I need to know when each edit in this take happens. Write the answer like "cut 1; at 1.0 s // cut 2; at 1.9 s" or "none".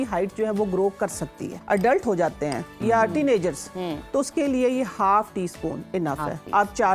cut 1; at 1.5 s